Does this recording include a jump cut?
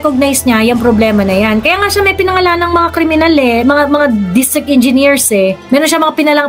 no; 0 cuts

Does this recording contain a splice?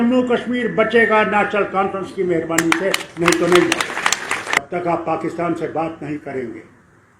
yes; 1 cut; at 4.6 s

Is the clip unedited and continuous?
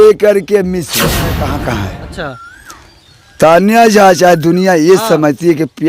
no; 1 cut; at 1.4 s

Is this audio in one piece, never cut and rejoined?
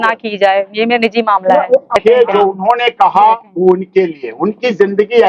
no; 1 cut; at 2.0 s

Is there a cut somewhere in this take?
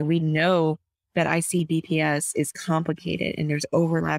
no; 0 cuts

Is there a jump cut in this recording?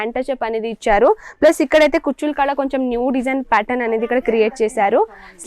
no; 0 cuts

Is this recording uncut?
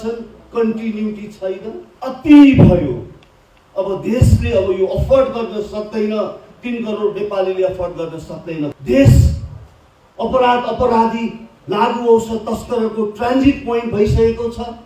no; 2 cuts; at 1.9 s, 8.7 s

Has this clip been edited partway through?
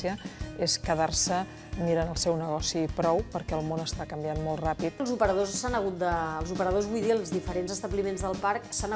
yes; 1 cut; at 4.9 s

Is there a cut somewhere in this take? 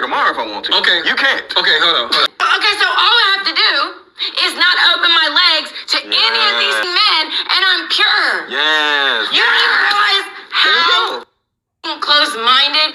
yes; 1 cut; at 2.3 s

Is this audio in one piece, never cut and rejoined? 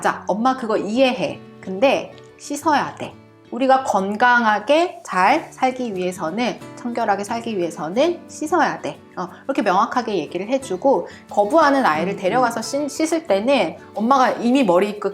no; 1 cut; at 13.8 s

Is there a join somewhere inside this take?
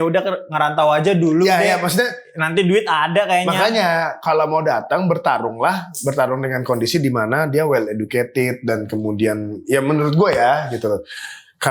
no; 0 cuts

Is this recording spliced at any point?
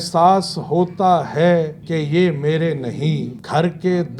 yes; 2 cuts; at 1.8 s, 3.3 s

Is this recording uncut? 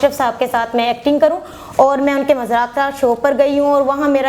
yes; 0 cuts

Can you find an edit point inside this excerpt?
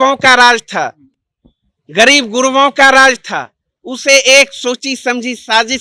no; 0 cuts

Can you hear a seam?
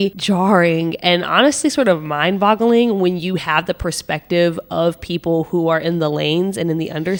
no; 0 cuts

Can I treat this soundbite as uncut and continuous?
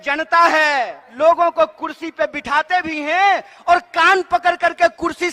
no; 1 cut; at 1.0 s

